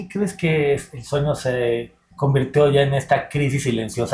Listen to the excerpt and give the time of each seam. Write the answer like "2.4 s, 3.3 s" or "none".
none